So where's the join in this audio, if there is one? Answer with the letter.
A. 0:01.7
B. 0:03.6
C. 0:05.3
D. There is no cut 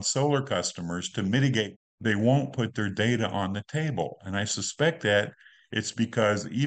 A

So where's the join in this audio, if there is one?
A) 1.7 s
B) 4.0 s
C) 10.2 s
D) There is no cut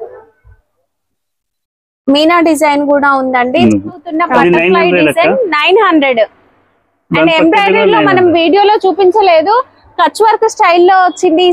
B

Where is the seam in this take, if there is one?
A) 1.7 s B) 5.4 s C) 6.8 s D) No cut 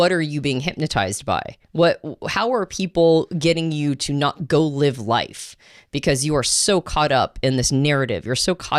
D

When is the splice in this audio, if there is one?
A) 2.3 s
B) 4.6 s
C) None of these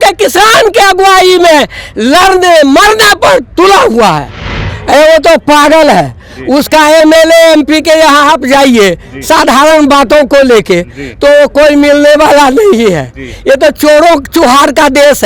B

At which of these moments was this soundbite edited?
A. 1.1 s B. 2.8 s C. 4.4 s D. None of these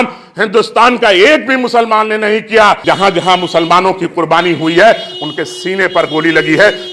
B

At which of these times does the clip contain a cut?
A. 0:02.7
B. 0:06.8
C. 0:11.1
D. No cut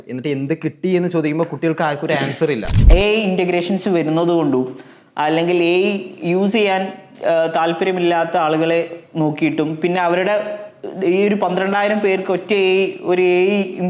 A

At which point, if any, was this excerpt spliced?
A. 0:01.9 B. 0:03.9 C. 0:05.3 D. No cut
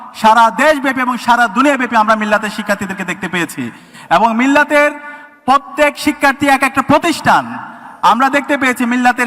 D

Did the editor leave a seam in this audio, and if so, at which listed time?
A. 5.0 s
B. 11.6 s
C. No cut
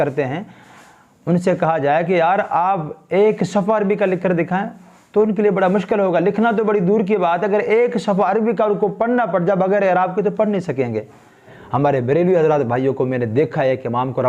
B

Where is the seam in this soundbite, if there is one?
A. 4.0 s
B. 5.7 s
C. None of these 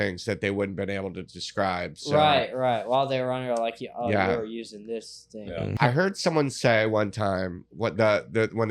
B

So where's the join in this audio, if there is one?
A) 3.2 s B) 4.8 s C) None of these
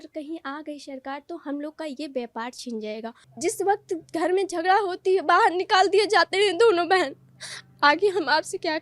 A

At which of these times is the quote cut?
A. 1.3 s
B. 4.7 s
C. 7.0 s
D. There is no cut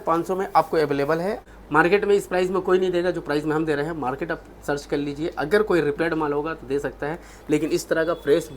A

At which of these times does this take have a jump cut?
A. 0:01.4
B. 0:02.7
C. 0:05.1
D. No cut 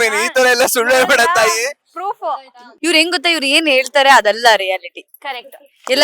B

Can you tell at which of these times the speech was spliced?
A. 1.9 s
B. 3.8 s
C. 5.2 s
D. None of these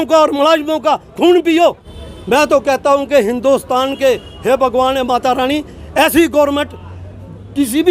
A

